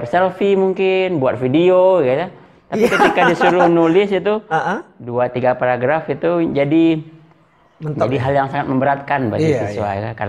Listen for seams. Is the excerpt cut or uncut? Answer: uncut